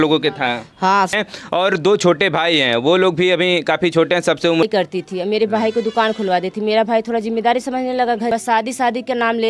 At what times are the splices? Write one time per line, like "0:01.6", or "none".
0:01.1
0:04.6
0:08.3